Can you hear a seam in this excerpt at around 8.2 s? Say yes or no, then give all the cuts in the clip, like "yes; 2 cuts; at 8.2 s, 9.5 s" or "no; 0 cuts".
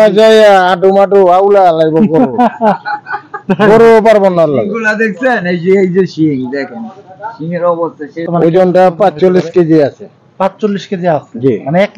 yes; 1 cut; at 8.2 s